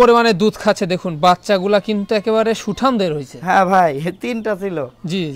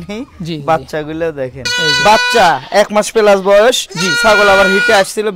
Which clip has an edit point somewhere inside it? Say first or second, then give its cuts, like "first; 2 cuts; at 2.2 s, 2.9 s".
second; 1 cut; at 1.8 s